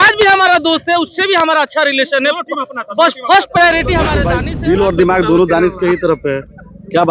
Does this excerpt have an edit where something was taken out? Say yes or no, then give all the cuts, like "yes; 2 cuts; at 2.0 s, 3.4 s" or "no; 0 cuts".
yes; 1 cut; at 4.3 s